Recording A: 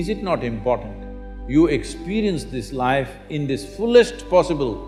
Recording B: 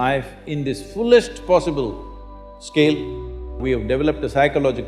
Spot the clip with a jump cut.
B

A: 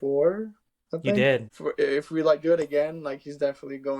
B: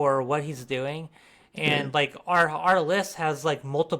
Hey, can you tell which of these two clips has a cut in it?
A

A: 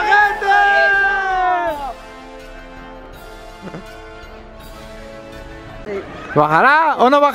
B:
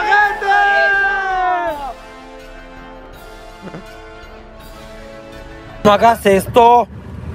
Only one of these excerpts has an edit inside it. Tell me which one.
B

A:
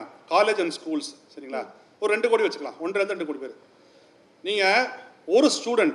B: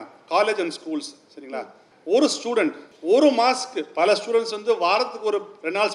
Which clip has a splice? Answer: B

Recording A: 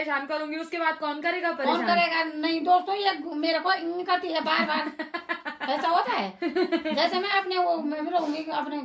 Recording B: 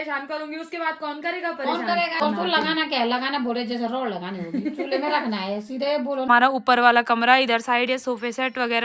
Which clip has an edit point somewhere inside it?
B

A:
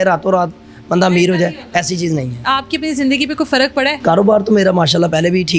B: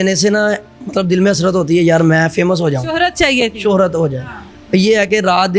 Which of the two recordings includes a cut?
A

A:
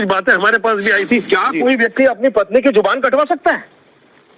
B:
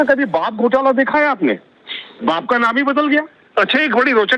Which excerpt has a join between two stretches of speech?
A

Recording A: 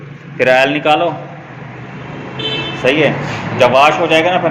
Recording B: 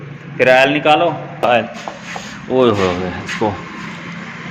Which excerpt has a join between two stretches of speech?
B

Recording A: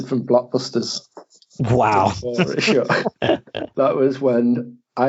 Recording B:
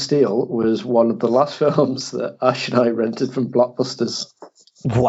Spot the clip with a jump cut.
A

